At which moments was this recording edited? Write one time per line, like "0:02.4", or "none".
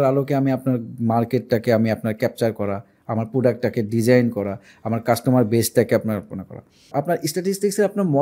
0:06.9